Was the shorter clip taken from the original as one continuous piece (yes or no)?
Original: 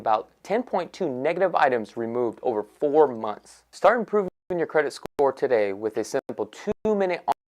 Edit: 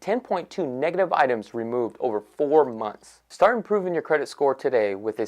no